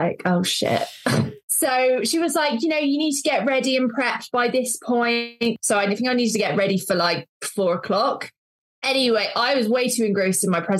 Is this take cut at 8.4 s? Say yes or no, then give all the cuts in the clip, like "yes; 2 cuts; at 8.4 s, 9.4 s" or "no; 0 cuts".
no; 2 cuts; at 1.4 s, 5.6 s